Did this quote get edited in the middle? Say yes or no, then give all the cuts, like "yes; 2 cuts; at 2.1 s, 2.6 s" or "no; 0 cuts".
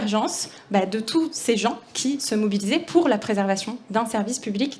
no; 0 cuts